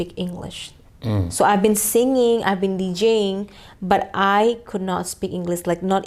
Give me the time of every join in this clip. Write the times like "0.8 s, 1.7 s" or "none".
none